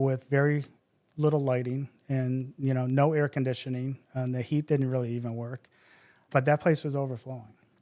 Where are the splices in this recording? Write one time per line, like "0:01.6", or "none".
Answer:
0:06.2